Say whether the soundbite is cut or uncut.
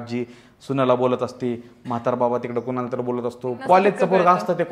cut